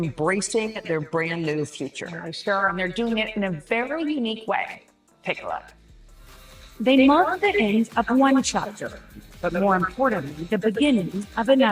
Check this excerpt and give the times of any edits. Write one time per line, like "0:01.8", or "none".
none